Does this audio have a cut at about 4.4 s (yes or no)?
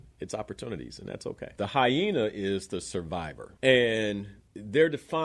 yes